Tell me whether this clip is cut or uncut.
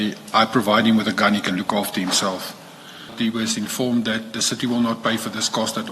cut